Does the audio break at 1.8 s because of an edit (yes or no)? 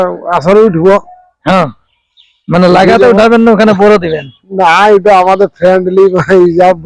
no